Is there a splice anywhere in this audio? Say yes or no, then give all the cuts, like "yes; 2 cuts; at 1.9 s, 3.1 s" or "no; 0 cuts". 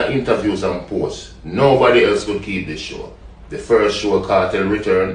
no; 0 cuts